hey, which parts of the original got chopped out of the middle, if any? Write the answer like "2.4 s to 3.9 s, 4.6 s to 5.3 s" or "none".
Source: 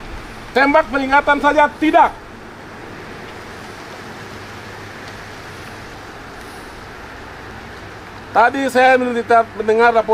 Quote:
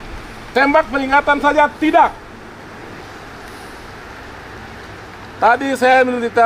3.0 s to 5.9 s